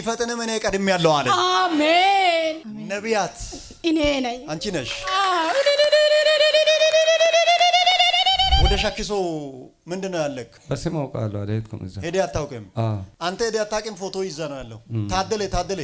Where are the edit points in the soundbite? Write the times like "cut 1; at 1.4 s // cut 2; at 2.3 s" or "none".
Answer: cut 1; at 2.6 s // cut 2; at 8.6 s